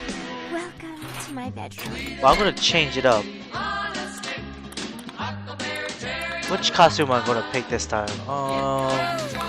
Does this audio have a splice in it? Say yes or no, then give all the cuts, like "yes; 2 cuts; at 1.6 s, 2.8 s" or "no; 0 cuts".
yes; 1 cut; at 3.4 s